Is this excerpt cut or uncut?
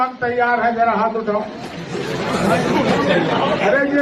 uncut